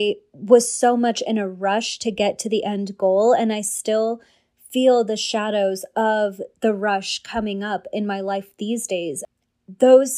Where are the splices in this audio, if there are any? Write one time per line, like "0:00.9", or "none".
0:09.2